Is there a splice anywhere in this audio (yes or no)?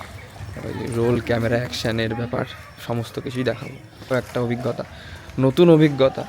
yes